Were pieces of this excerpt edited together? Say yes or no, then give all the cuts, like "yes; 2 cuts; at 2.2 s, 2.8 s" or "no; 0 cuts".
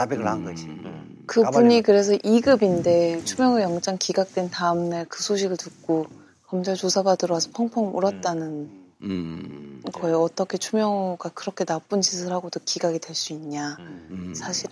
yes; 1 cut; at 13.3 s